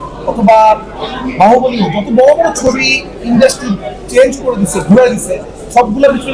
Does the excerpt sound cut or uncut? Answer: uncut